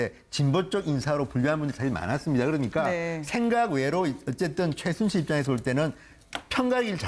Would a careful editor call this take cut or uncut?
uncut